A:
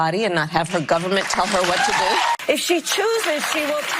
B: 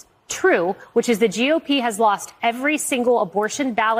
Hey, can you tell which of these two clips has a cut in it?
A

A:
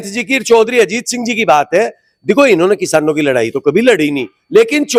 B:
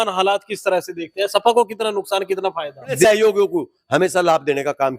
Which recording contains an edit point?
B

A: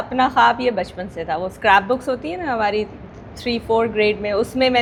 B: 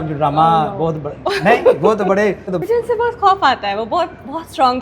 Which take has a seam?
B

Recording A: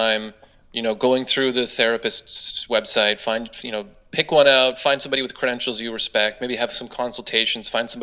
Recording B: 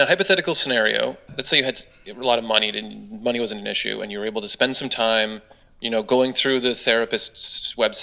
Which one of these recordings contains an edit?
B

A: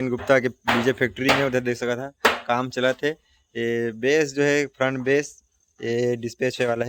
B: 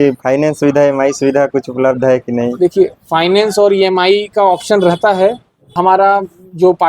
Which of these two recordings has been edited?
B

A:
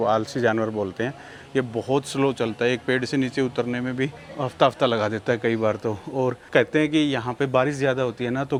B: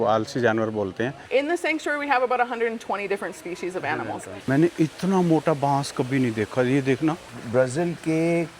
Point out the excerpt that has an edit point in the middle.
B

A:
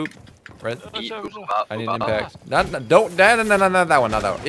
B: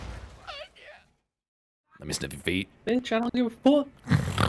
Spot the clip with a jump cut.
B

